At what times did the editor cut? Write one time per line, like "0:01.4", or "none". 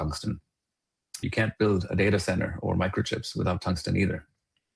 0:01.2